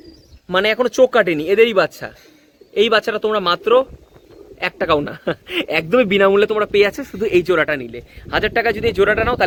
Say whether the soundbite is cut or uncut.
uncut